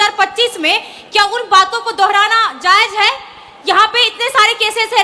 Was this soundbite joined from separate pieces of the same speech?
no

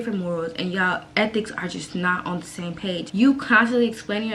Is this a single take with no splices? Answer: yes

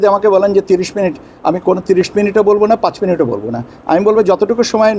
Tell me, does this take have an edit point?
no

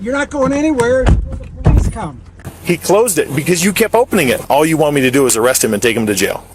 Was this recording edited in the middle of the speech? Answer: yes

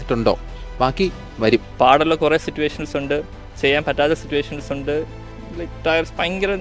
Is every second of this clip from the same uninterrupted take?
no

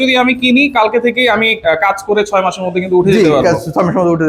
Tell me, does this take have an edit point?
no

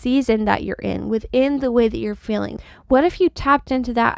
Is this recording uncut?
no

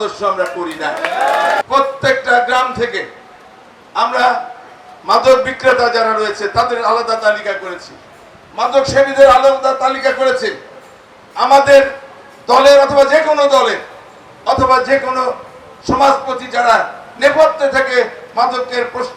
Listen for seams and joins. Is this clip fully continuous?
no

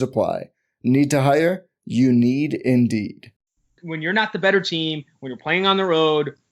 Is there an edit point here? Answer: yes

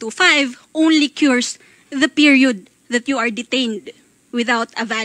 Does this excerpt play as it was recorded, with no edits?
yes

